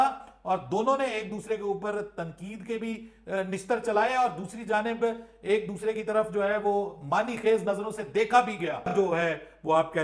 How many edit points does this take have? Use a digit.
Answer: 1